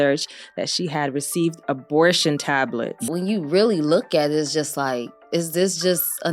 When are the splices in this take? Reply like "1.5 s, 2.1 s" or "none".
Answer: 3.0 s